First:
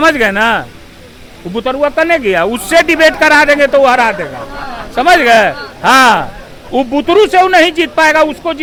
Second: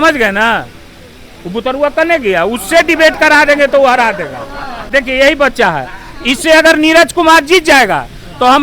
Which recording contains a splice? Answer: second; 1 cut; at 4.8 s

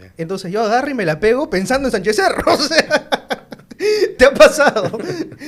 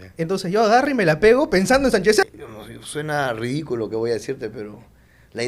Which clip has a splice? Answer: second; 1 cut; at 2.2 s

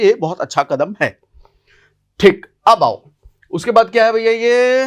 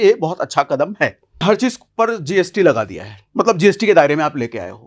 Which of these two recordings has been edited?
second; 1 cut; at 1.4 s

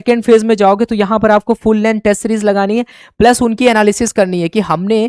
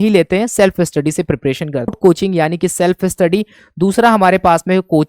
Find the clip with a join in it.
second; 1 cut; at 2.0 s

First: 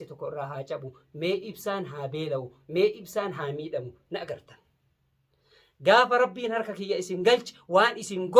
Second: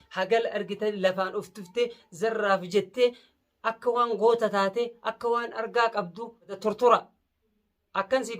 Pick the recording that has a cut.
second; 1 cut; at 6.5 s

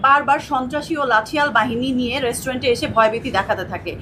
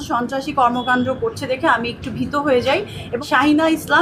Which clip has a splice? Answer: second; 1 cut; at 3.0 s

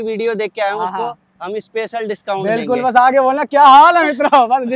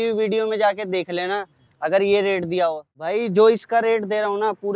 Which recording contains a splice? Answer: second; 1 cut; at 3.2 s

